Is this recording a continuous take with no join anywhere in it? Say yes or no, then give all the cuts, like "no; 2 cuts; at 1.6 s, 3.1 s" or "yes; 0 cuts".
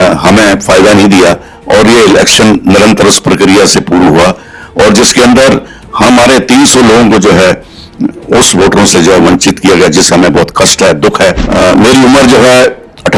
no; 1 cut; at 11.4 s